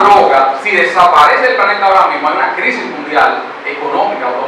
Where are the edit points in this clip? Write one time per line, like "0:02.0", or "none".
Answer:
none